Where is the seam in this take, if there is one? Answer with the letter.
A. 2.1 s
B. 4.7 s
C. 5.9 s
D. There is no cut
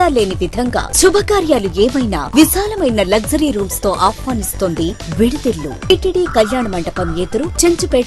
C